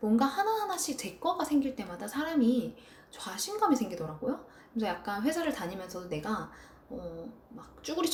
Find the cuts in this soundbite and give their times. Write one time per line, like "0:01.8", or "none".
none